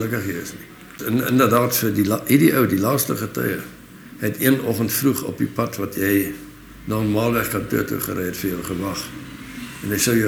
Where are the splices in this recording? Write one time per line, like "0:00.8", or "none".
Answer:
0:00.9